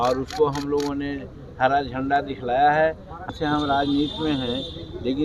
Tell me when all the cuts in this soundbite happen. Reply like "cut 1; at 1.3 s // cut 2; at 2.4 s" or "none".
cut 1; at 3.3 s